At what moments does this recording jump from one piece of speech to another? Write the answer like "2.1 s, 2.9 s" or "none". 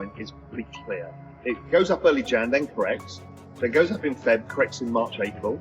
1.3 s